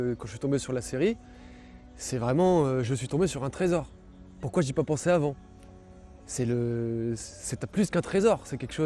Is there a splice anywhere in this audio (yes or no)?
no